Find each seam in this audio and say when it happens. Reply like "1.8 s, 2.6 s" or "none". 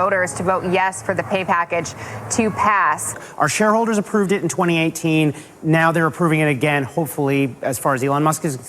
3.1 s